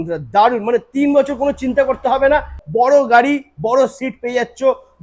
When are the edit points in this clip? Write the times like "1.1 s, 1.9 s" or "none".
2.6 s